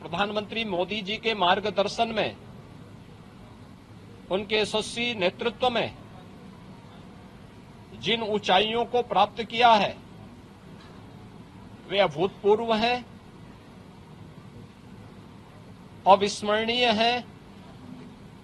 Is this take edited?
no; 0 cuts

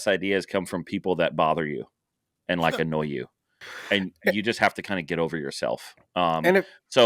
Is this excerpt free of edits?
yes; 0 cuts

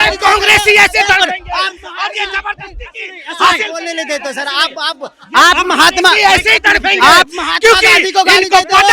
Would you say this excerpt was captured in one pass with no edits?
yes; 0 cuts

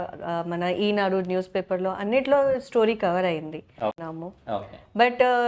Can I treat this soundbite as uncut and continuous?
no; 1 cut; at 4.0 s

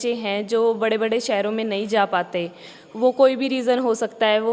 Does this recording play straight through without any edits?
yes; 0 cuts

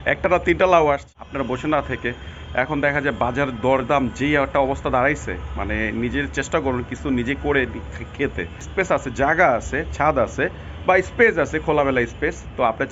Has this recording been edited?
yes; 2 cuts; at 1.1 s, 8.7 s

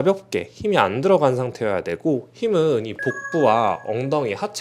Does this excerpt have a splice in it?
no; 0 cuts

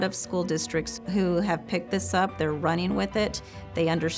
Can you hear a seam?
yes; 1 cut; at 1.0 s

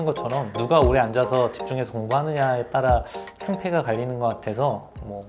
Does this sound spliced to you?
no; 0 cuts

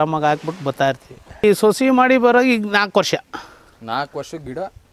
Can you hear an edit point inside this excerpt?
yes; 1 cut; at 1.4 s

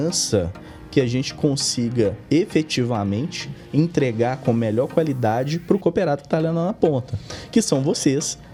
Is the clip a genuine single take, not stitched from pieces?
yes; 0 cuts

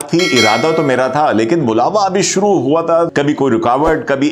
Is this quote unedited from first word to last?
no; 1 cut; at 3.1 s

